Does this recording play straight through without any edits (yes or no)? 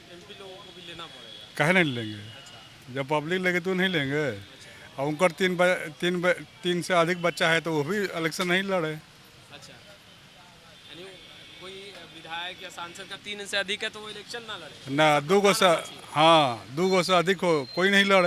yes